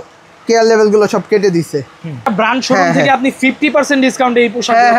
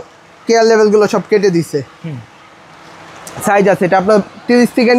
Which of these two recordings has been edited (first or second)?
first